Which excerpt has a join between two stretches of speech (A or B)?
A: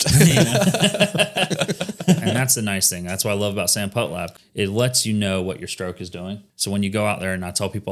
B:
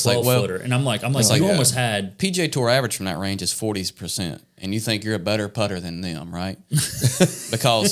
A